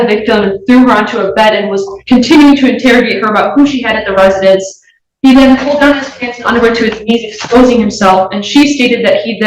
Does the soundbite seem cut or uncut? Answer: uncut